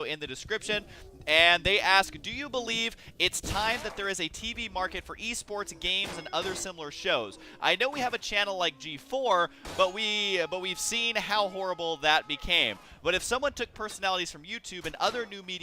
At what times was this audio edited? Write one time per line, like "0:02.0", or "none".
0:11.8